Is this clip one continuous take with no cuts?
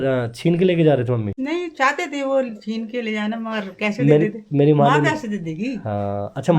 no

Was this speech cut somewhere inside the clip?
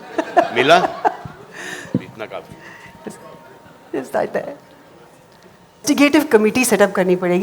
yes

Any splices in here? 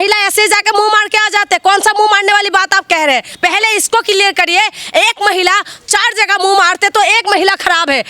yes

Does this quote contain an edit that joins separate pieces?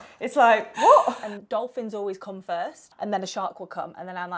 yes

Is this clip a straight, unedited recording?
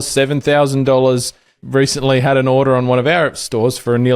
no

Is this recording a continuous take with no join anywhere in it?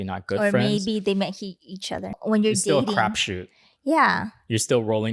no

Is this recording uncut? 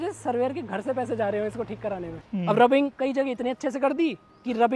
no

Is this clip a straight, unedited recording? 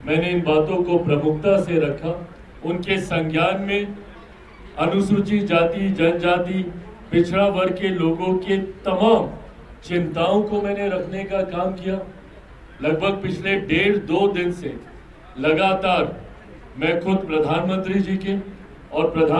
yes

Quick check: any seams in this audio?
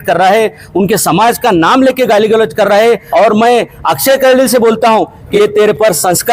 yes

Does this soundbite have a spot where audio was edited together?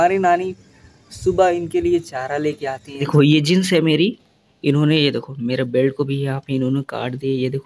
yes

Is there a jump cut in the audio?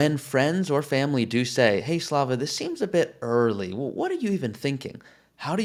no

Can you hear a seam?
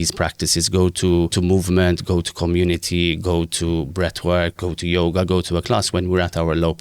yes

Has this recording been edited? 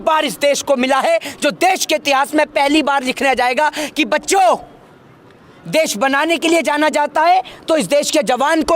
no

